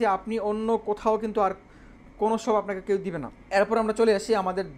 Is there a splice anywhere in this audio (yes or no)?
no